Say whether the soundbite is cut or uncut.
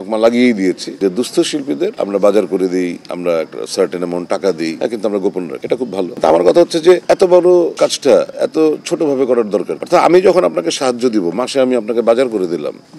uncut